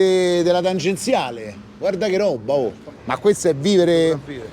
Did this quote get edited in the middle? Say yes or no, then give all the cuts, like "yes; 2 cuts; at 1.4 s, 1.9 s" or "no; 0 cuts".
yes; 1 cut; at 3.0 s